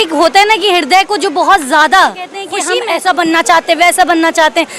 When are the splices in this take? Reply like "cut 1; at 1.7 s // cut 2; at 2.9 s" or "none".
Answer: cut 1; at 2.6 s